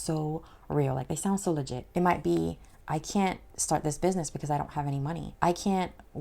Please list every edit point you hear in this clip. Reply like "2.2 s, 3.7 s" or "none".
1.8 s, 5.2 s